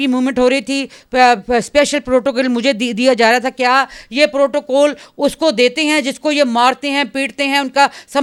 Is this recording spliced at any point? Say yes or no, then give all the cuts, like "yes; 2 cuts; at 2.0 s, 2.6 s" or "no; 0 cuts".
no; 0 cuts